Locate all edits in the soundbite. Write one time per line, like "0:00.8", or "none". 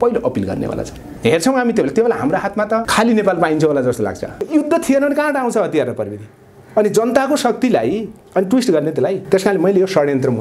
0:01.1
0:04.4
0:09.2